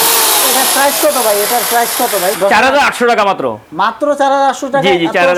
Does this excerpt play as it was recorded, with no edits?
yes; 0 cuts

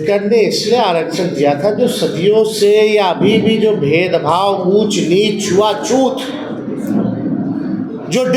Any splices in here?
no; 0 cuts

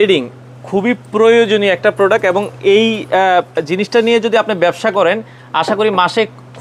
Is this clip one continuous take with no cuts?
yes; 0 cuts

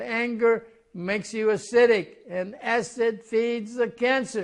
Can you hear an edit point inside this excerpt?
no; 0 cuts

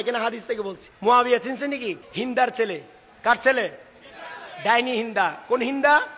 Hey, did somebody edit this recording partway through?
yes; 2 cuts; at 1.1 s, 2.0 s

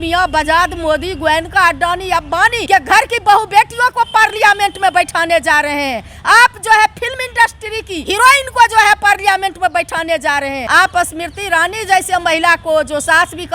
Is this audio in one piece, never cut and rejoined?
no; 3 cuts; at 2.6 s, 7.9 s, 10.6 s

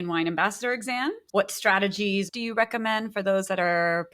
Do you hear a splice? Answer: yes; 2 cuts; at 1.3 s, 2.3 s

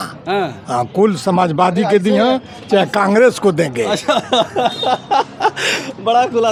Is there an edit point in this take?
no; 0 cuts

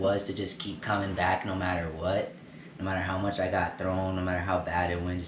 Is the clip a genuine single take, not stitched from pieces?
yes; 0 cuts

